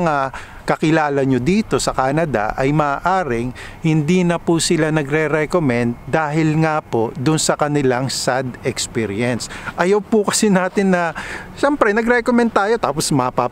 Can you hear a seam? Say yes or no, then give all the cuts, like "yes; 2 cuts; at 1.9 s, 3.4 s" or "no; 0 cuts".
no; 0 cuts